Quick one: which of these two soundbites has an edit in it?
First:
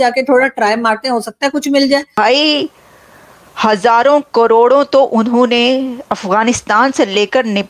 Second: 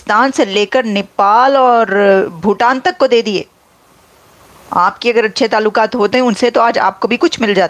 first; 1 cut; at 2.1 s

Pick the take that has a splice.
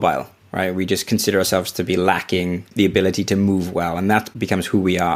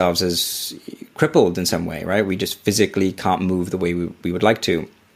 first; 2 cuts; at 2.7 s, 4.3 s

